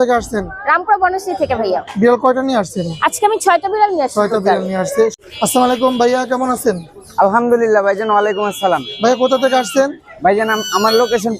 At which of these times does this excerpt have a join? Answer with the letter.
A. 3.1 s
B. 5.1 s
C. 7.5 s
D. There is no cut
B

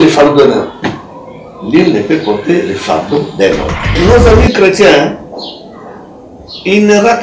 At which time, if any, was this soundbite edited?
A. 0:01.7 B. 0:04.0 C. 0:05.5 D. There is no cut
B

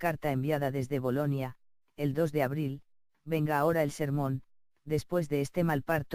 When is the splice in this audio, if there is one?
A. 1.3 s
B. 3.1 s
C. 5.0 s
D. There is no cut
A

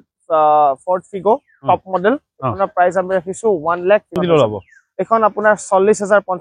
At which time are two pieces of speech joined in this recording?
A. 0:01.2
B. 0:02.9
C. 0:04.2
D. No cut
C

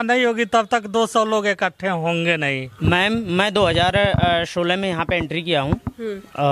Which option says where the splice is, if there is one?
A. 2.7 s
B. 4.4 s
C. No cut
A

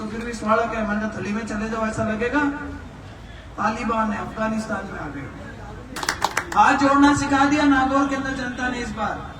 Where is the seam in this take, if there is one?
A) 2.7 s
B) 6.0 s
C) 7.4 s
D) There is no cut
B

